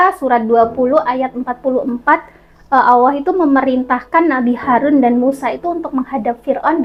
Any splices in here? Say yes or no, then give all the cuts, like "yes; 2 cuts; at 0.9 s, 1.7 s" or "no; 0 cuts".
no; 0 cuts